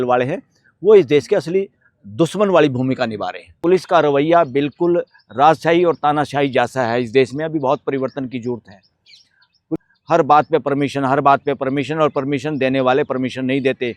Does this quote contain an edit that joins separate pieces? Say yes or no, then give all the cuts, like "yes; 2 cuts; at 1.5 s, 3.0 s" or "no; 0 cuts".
yes; 2 cuts; at 3.6 s, 9.7 s